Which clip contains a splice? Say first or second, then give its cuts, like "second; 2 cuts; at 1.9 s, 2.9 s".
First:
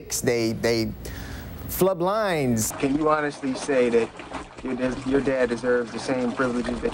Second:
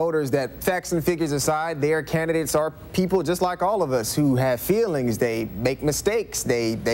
first; 1 cut; at 2.7 s